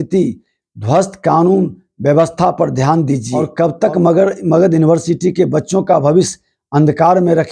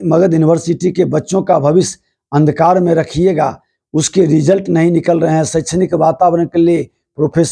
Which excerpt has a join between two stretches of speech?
first; 1 cut; at 3.4 s

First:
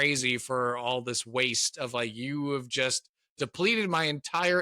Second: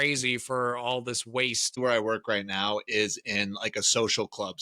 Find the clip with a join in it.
second; 1 cut; at 1.8 s

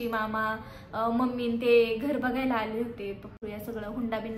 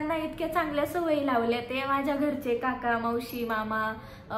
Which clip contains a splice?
first; 1 cut; at 3.4 s

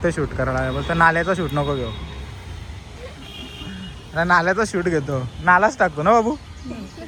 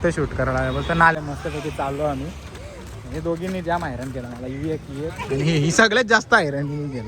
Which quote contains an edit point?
second; 1 cut; at 1.1 s

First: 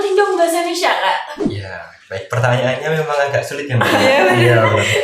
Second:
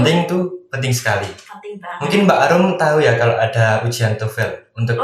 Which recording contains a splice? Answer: first; 1 cut; at 1.3 s

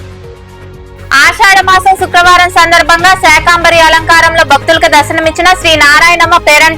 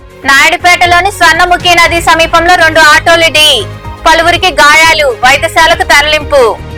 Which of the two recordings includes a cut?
first; 1 cut; at 1.1 s

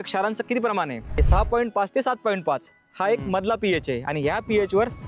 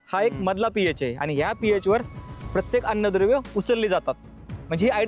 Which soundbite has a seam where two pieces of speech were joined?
first; 1 cut; at 1.2 s

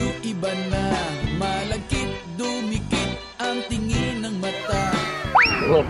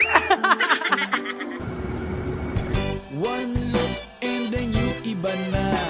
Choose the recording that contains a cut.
second; 1 cut; at 1.6 s

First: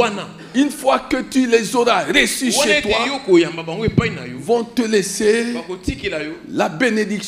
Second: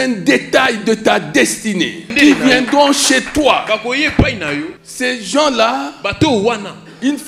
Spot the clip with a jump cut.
second; 2 cuts; at 2.1 s, 4.8 s

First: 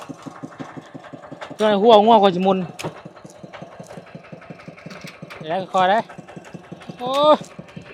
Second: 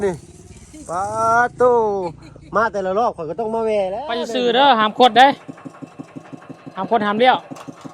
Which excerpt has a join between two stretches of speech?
second; 1 cut; at 4.2 s

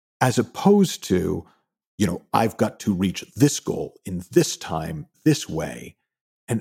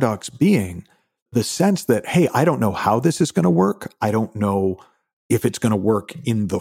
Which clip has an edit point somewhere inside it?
second; 1 cut; at 1.3 s

